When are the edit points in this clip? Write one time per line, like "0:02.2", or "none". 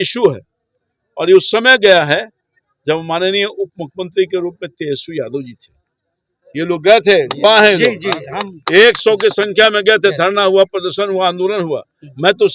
none